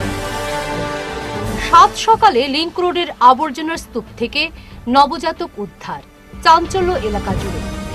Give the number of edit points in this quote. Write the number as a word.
zero